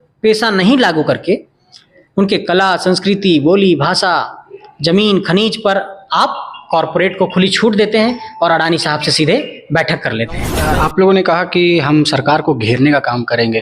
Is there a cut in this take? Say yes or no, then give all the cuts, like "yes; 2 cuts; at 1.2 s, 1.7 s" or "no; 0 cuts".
yes; 1 cut; at 10.7 s